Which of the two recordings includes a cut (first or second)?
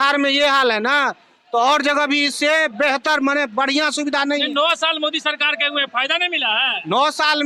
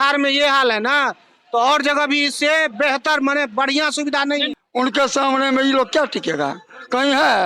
second